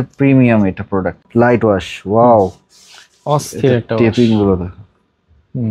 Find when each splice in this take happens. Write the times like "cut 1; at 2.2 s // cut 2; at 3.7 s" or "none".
cut 1; at 1.2 s